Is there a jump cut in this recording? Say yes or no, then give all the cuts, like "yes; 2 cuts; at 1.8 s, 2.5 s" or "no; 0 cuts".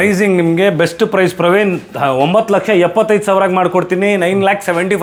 no; 0 cuts